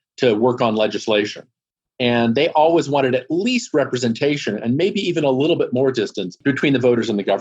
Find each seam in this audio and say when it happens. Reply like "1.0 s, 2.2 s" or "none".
6.4 s